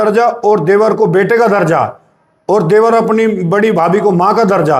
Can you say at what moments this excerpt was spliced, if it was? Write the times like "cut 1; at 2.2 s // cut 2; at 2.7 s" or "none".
none